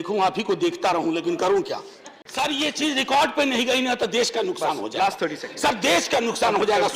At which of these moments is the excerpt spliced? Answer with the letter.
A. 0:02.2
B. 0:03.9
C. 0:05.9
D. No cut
A